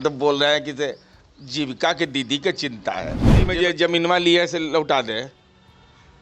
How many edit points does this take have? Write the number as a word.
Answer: one